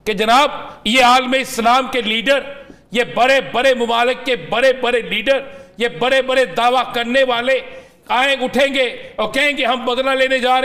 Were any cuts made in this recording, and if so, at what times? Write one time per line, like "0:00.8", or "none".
none